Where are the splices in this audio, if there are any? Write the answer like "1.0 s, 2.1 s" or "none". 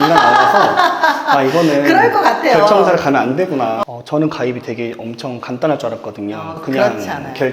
3.8 s